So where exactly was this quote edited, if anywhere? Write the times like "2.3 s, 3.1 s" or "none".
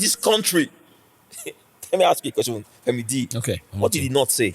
3.3 s